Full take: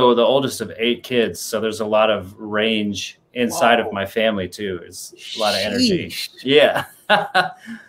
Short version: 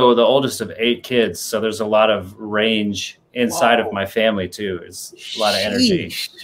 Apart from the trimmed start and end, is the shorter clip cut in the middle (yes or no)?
no